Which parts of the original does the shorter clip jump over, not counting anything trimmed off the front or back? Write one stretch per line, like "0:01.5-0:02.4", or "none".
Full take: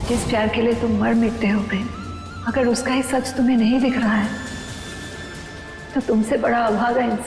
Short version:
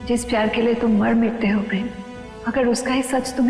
none